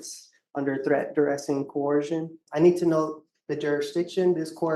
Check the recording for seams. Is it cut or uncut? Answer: cut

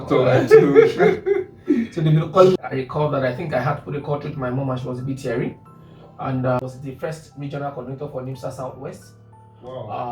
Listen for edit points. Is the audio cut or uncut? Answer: cut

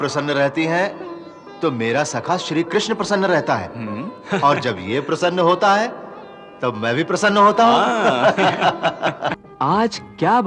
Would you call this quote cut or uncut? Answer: cut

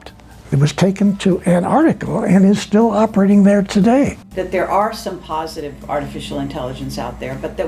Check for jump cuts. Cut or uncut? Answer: cut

